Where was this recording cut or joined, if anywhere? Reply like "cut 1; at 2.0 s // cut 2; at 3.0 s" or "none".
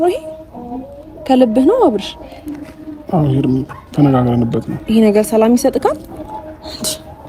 none